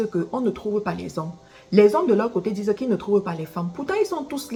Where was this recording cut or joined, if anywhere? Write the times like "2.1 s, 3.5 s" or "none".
none